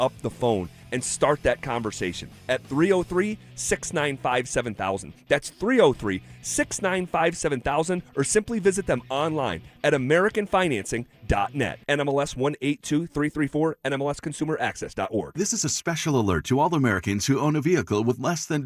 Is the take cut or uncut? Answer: cut